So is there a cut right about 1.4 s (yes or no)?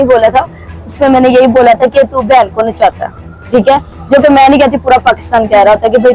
no